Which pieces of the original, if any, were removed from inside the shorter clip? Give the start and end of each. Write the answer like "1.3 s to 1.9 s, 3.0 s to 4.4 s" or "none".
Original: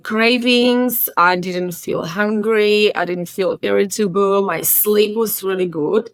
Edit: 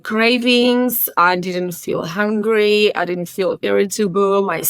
none